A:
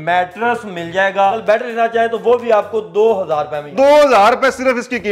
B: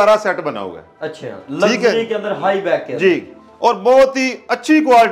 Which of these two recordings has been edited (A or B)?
A